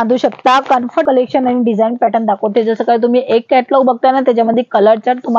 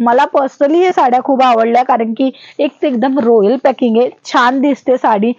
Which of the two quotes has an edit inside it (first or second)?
first